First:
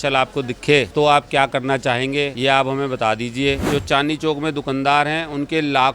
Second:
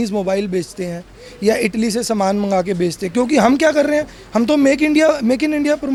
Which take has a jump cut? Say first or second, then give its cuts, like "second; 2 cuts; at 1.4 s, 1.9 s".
first; 3 cuts; at 0.9 s, 2.3 s, 3.6 s